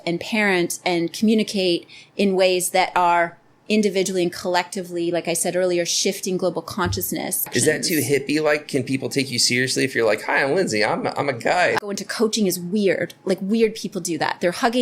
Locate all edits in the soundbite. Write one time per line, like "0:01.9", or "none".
0:07.5
0:11.8

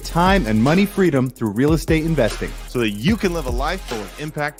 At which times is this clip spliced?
none

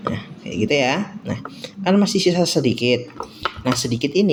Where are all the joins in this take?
none

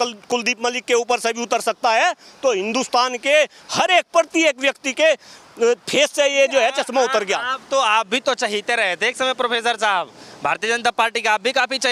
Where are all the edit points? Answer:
none

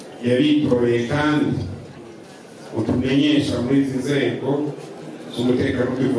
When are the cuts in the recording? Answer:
none

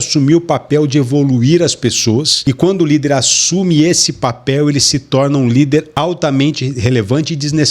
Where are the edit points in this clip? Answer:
0:02.3
0:05.9

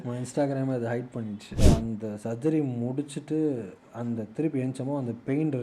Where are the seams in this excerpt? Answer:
0:01.6

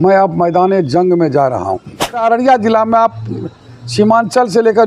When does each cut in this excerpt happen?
0:02.2

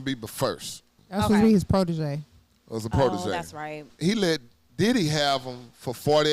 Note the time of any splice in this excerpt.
0:01.0
0:03.9

